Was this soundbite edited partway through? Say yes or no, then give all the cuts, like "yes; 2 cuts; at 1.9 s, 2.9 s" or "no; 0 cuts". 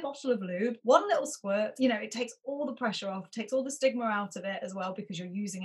yes; 2 cuts; at 0.8 s, 1.7 s